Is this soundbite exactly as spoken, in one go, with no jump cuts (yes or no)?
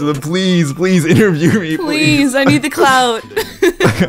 yes